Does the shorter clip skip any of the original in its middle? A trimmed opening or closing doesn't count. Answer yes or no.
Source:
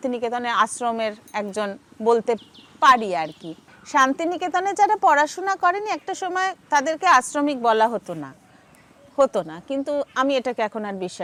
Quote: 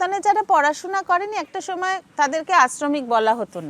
no